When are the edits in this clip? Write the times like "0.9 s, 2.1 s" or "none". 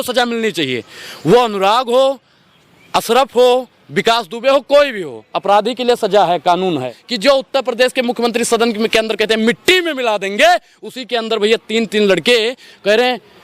7.0 s